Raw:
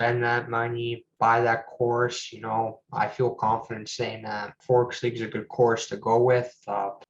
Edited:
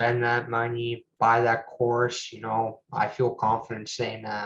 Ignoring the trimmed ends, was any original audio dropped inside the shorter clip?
no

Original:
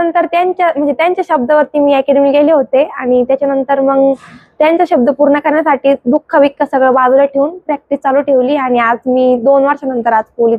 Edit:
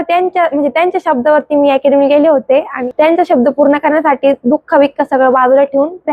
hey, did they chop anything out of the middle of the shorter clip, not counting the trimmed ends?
yes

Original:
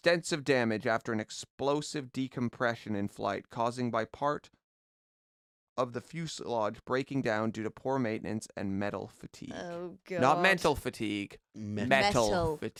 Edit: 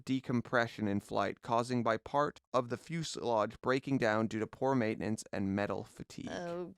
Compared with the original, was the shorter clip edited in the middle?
yes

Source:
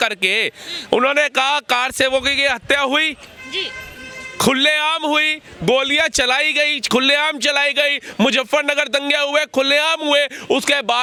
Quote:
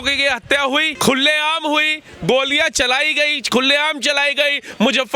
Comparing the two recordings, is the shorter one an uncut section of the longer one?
no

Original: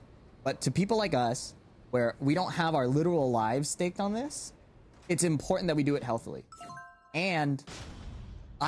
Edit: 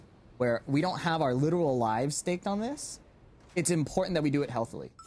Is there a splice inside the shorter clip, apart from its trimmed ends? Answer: no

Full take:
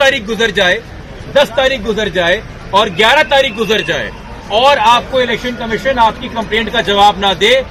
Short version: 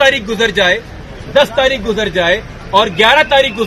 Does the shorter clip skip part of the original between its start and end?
no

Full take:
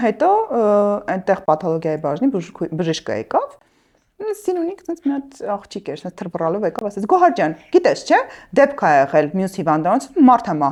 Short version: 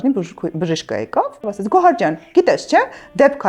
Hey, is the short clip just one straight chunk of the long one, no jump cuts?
no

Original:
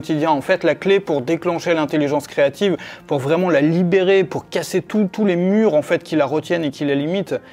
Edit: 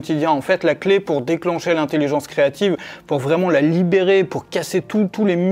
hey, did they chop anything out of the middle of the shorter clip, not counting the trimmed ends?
no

